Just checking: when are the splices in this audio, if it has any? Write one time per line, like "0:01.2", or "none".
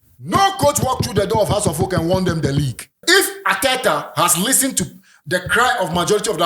0:03.0